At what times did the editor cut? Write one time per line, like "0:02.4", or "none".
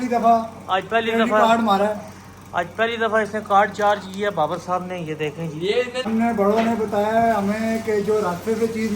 0:06.1